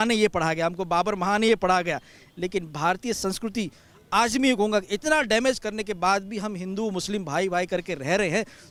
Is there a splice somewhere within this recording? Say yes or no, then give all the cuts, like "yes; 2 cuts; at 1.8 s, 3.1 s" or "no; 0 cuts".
no; 0 cuts